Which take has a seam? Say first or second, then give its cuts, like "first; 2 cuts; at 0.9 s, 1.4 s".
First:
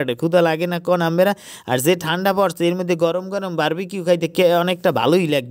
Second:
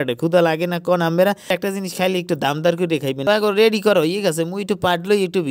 second; 2 cuts; at 1.5 s, 3.2 s